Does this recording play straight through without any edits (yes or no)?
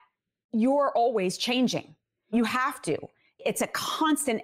no